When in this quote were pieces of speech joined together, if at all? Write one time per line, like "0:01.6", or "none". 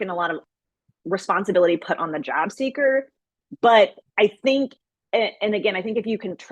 0:01.0